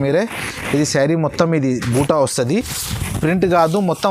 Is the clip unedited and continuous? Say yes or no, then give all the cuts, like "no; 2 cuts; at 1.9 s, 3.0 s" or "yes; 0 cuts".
yes; 0 cuts